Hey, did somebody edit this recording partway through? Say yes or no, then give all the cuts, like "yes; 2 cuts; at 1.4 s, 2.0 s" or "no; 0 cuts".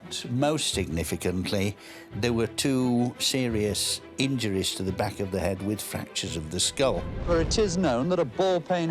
yes; 1 cut; at 7.3 s